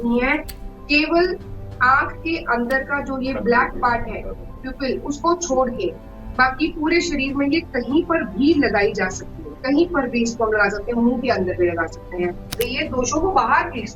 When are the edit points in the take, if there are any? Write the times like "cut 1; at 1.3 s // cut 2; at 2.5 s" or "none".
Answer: cut 1; at 12.5 s